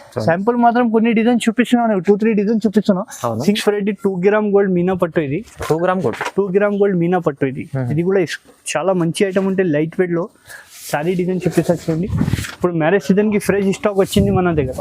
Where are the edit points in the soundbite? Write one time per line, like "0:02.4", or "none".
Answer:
0:03.3

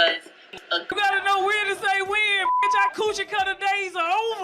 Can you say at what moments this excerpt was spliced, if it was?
0:00.9

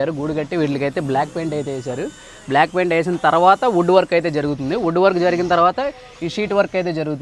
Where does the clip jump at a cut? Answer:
none

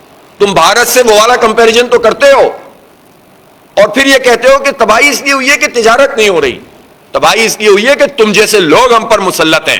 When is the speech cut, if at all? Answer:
none

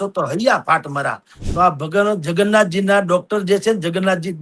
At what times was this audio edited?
0:01.3

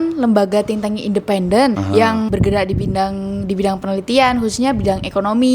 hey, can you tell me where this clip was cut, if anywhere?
0:02.1

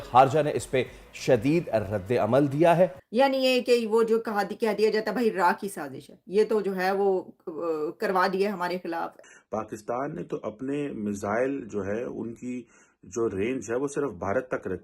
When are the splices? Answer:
0:03.0
0:09.1

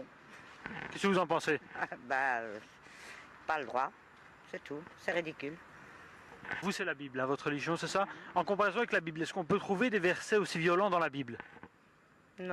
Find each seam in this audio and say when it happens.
none

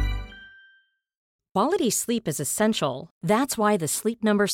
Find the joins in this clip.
0:01.2

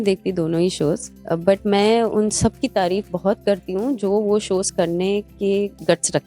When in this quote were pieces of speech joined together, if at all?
0:01.1

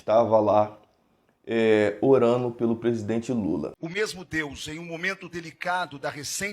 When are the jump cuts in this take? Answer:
0:03.8

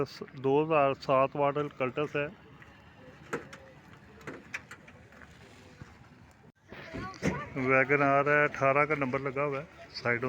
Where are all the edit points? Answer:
0:06.6

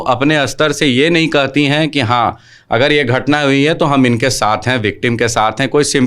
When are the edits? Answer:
none

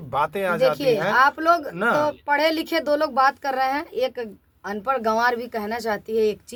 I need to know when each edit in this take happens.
none

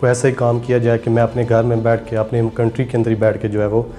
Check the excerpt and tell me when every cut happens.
none

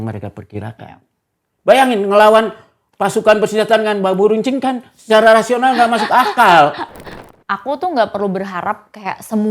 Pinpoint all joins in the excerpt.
0:07.1

